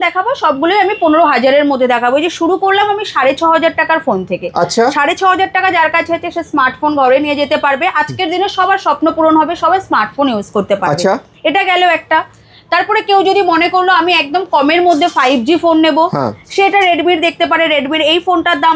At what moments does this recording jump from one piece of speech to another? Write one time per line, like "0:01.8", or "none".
none